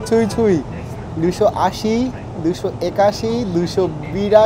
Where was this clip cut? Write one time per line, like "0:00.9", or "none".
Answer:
none